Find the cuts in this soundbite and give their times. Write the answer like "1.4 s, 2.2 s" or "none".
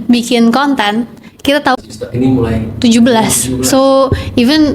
1.8 s